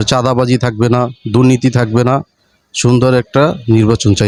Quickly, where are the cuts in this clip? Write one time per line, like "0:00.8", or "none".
none